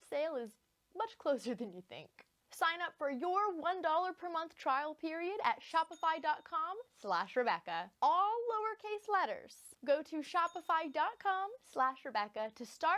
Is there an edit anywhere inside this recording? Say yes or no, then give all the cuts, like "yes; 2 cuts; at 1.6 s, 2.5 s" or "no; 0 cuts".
yes; 1 cut; at 2.4 s